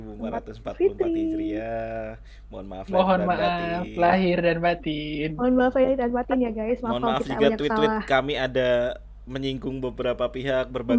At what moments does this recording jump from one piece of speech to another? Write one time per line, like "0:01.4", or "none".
none